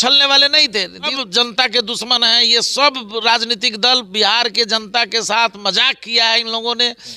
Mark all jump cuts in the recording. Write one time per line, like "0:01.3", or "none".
0:01.2